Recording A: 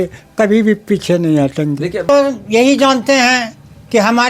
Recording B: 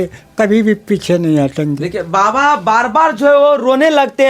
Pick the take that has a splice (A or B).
A